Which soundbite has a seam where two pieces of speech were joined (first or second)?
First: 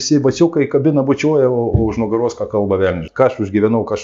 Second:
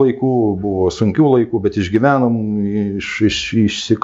first